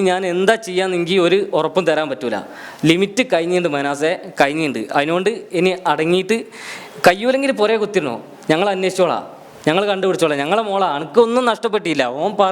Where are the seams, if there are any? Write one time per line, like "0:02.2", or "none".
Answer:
none

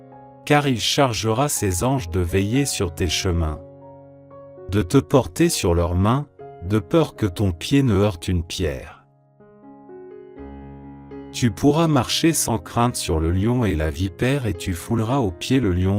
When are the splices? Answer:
0:09.0
0:11.0

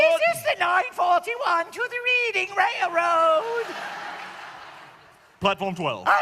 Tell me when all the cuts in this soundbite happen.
none

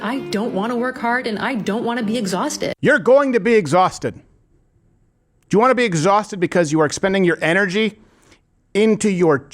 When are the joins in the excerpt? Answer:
0:02.7

